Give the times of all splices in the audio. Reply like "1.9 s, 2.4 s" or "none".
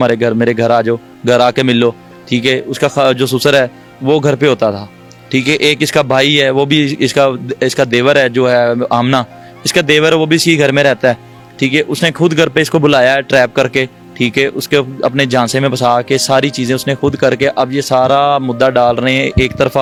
none

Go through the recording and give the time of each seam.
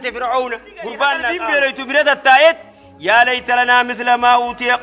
1.3 s

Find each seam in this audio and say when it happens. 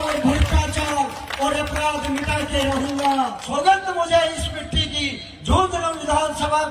3.4 s

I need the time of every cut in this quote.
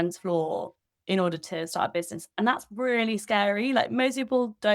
none

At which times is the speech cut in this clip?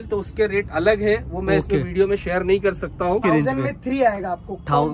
3.2 s

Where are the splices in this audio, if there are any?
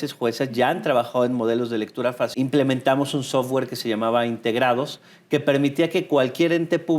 2.3 s

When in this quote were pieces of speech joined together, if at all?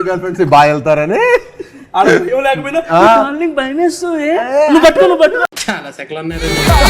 5.6 s

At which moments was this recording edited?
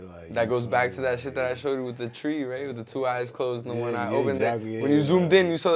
none

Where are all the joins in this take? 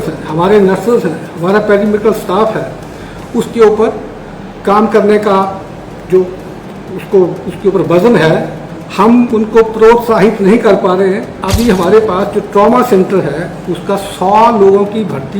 11.4 s

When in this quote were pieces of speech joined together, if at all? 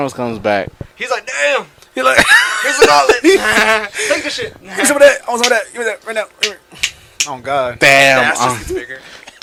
none

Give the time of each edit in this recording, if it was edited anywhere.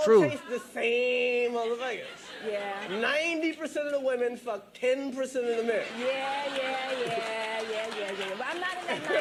none

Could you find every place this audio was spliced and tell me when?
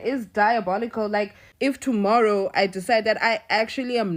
1.4 s

